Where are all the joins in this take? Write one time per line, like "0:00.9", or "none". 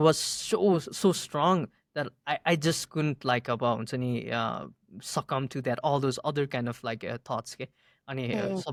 none